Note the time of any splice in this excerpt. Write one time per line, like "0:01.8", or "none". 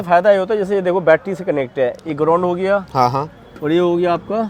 none